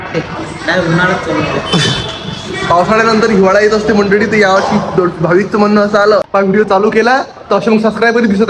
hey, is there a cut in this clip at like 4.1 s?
no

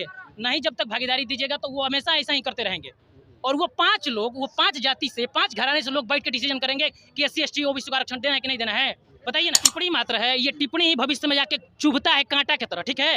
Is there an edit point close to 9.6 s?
yes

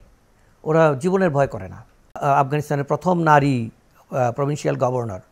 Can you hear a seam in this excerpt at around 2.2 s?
yes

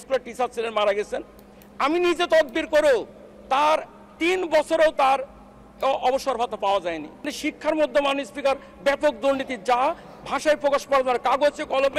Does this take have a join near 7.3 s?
yes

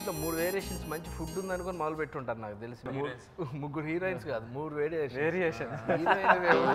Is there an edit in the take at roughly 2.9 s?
yes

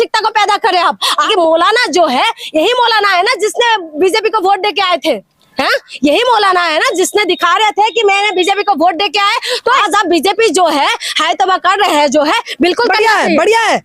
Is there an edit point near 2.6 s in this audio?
no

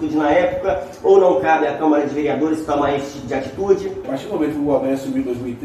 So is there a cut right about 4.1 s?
yes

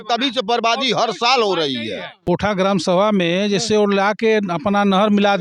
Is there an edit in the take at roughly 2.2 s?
yes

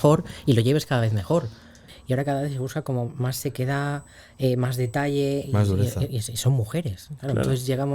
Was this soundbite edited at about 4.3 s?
no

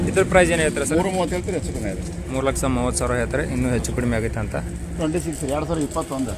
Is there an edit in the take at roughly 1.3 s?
no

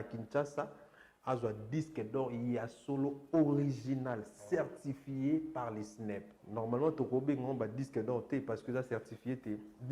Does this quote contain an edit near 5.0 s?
no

